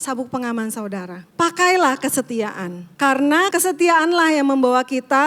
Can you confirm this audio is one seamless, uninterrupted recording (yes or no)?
no